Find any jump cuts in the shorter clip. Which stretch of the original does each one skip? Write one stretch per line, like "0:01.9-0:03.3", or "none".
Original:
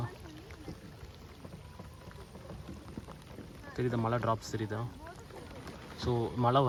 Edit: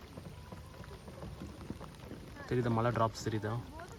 none

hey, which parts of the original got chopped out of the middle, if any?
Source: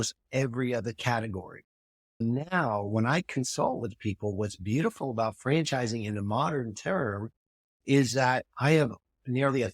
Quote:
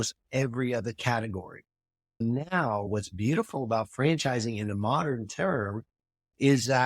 0:02.9-0:04.3

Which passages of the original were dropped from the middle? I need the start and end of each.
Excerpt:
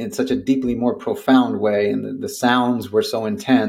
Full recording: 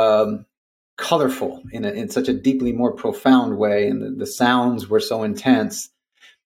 none

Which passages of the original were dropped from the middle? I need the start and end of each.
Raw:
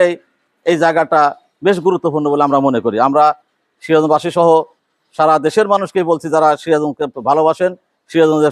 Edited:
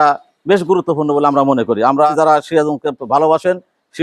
0:03.3-0:06.3

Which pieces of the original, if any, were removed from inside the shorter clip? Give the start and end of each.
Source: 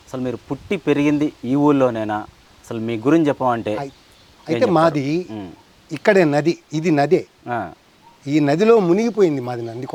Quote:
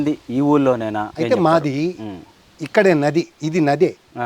0:02.2-0:04.4

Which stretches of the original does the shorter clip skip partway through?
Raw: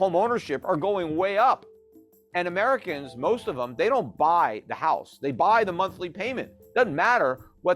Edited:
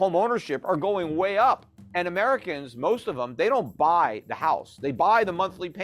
0:01.8-0:02.2

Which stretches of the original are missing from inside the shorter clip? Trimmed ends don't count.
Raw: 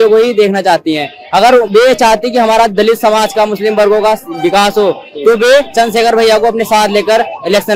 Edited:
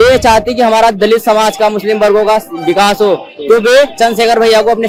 none

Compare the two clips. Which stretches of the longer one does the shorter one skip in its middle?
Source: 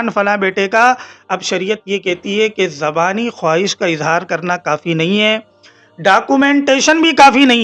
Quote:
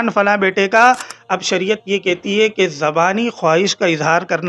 none

